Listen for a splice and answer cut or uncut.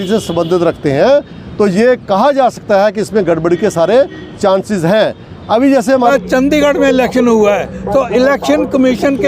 cut